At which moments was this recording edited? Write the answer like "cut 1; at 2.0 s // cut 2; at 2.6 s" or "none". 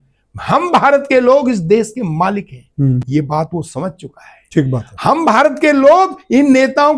none